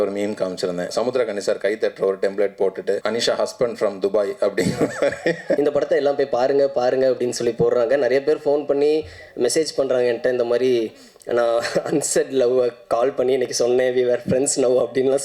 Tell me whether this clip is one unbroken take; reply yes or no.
no